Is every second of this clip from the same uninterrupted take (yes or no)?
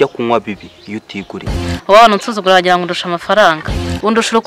no